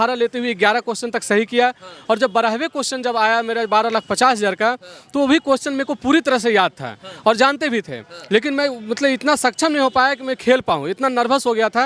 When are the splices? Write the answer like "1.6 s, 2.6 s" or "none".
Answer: none